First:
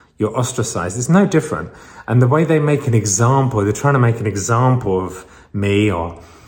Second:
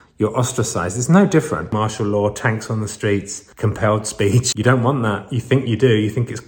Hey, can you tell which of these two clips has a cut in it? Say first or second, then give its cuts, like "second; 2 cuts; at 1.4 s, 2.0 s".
second; 3 cuts; at 1.7 s, 3.4 s, 4.5 s